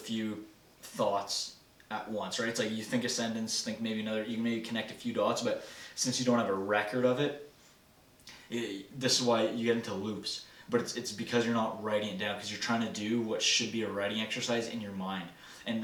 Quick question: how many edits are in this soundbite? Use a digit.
0